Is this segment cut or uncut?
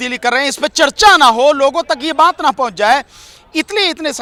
uncut